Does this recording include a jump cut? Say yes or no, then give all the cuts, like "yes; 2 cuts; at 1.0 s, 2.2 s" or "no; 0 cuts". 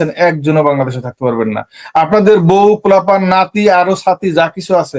no; 0 cuts